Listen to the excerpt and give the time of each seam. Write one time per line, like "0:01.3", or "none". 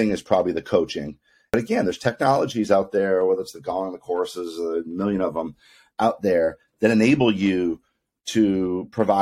0:01.5